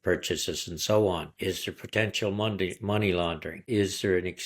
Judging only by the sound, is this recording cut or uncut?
cut